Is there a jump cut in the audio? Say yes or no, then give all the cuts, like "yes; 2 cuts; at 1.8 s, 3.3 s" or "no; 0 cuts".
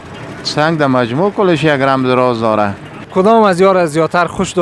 yes; 1 cut; at 3.0 s